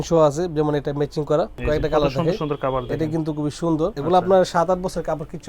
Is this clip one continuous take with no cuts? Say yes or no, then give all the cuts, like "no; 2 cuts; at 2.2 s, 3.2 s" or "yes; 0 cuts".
no; 2 cuts; at 1.6 s, 4.0 s